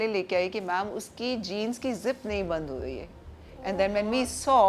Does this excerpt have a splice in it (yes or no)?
no